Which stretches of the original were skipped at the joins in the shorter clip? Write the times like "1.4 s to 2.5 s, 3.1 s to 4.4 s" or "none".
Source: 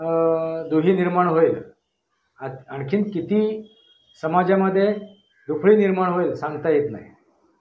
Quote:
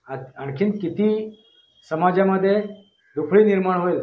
none